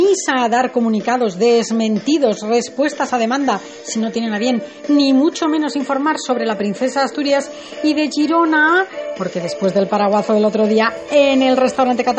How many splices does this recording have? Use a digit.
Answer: 1